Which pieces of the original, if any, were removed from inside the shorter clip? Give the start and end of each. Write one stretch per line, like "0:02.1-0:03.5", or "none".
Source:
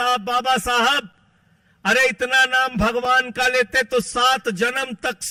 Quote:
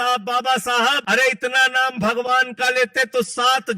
0:01.0-0:01.8